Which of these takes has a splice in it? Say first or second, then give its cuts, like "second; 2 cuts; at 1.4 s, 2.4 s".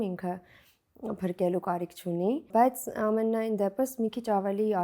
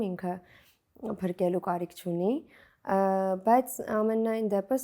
first; 1 cut; at 2.5 s